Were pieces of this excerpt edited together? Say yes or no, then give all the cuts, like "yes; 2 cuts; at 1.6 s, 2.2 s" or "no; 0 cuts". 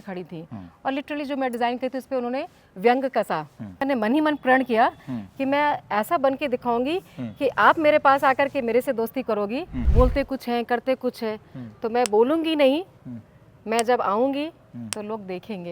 yes; 2 cuts; at 3.8 s, 9.8 s